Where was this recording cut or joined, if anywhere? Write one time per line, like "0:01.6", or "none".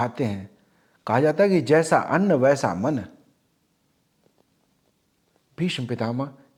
none